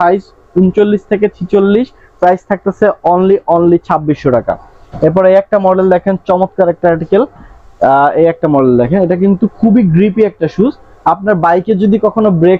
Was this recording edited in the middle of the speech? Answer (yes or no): no